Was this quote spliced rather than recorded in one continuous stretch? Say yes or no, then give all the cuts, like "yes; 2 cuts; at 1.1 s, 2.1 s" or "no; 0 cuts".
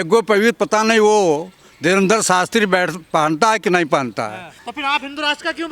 yes; 1 cut; at 4.6 s